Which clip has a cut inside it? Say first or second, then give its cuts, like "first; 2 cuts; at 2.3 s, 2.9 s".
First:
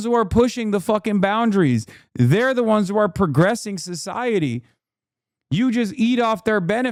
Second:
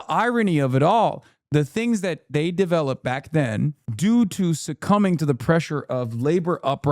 second; 2 cuts; at 1.3 s, 3.8 s